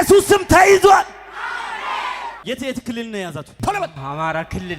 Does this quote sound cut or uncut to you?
cut